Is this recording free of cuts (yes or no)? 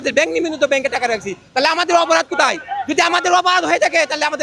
yes